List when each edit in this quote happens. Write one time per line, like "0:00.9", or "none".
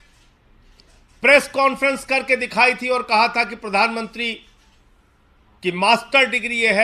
none

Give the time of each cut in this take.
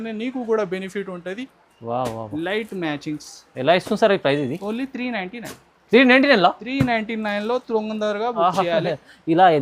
0:01.5

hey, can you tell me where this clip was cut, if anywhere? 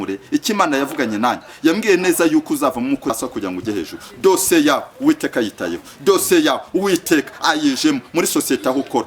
0:03.1

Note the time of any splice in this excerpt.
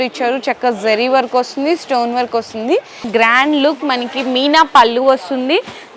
0:03.1

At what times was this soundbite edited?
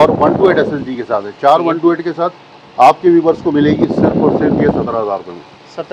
none

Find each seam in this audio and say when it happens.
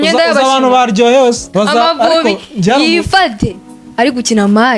0:01.4

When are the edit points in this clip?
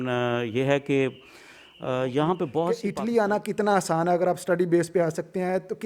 0:02.8

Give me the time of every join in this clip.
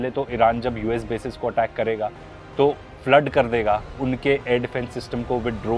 none

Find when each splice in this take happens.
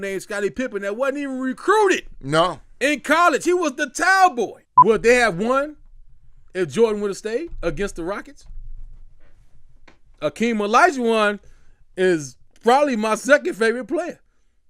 0:04.6

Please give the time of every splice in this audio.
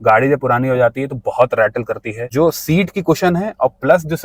0:02.1

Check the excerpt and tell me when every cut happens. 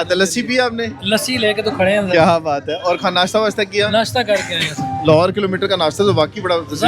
none

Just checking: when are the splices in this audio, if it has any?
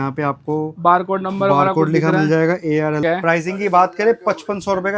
0:03.0

